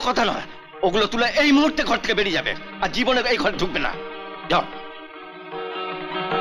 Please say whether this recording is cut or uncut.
uncut